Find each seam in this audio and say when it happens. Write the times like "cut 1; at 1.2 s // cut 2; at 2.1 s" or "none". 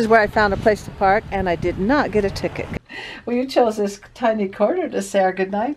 cut 1; at 2.6 s